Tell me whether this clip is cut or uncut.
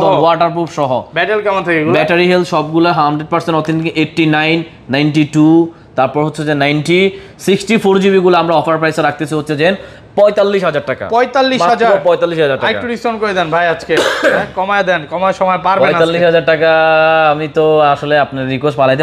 uncut